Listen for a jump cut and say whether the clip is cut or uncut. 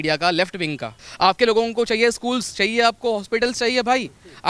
cut